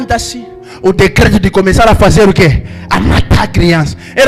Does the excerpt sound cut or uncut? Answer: uncut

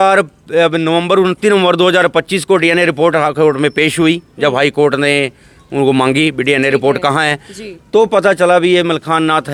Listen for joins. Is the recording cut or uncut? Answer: uncut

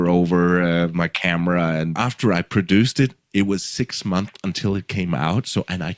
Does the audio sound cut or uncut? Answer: cut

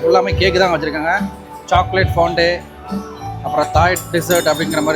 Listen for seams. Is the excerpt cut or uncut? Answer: uncut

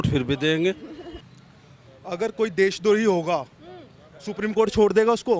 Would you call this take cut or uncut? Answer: cut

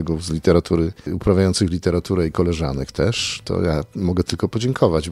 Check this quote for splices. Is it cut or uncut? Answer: cut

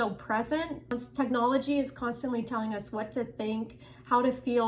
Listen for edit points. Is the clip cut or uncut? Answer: cut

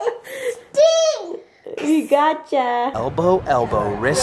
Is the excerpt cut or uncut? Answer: cut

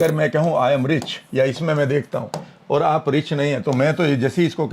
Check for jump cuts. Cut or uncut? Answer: uncut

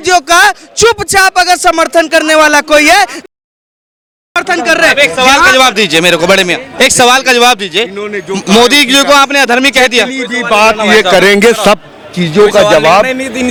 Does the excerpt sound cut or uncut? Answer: uncut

